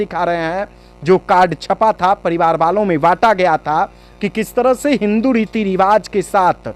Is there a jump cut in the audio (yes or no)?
no